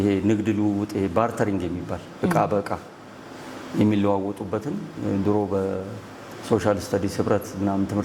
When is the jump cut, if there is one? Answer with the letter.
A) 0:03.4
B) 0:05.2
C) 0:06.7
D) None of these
D